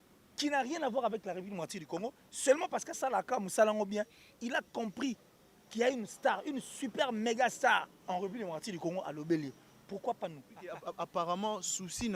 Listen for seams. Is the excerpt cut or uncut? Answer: cut